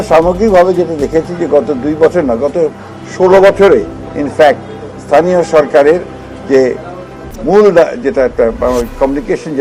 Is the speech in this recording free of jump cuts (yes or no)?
yes